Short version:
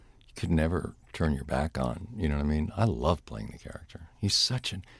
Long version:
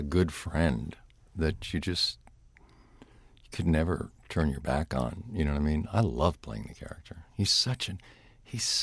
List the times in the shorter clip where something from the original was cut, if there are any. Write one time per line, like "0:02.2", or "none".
none